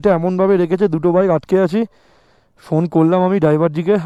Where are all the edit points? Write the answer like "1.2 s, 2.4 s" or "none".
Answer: none